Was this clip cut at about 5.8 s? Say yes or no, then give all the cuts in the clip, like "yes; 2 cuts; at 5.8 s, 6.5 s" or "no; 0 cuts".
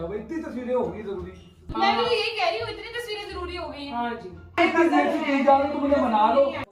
no; 2 cuts; at 1.6 s, 4.6 s